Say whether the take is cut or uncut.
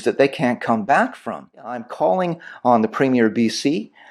cut